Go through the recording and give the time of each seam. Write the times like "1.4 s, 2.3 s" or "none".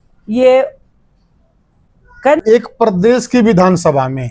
2.4 s